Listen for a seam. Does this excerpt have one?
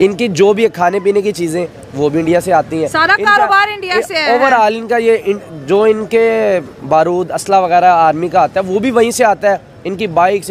no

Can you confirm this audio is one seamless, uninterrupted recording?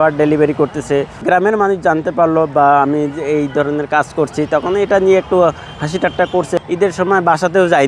no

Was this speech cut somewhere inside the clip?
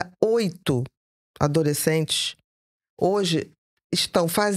no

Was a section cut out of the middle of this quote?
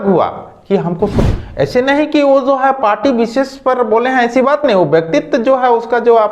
yes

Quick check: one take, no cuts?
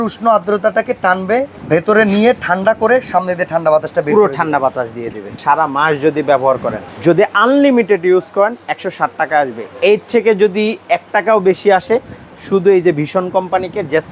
no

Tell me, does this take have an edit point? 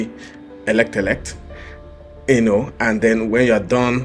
no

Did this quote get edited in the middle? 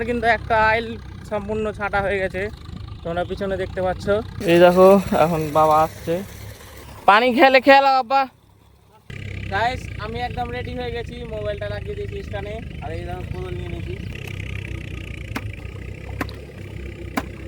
yes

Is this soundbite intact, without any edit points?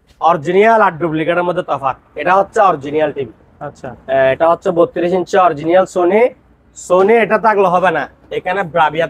yes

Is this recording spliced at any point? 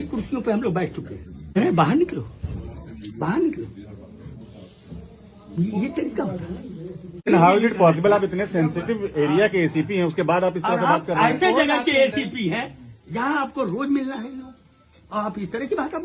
yes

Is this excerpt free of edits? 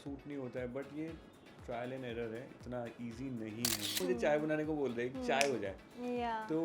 no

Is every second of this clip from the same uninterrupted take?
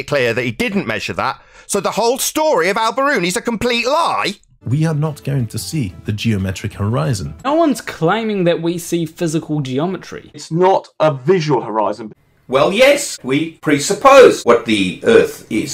no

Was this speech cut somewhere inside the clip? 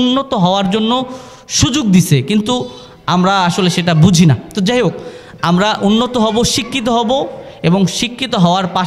no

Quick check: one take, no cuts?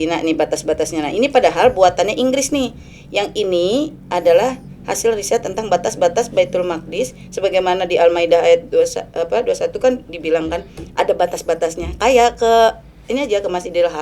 yes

